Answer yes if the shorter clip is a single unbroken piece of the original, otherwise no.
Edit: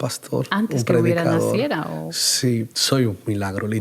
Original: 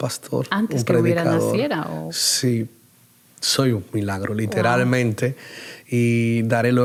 no